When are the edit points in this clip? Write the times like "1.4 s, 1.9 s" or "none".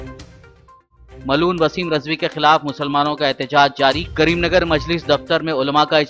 1.2 s